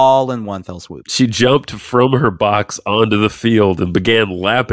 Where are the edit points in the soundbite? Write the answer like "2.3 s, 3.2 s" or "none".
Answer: 1.2 s

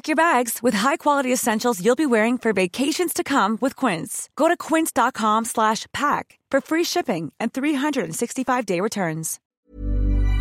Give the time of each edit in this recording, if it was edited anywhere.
9.4 s

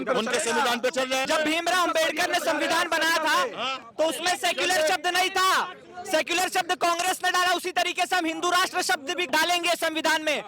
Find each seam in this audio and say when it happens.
1.3 s, 9.2 s

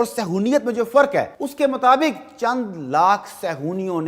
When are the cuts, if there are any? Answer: 1.4 s

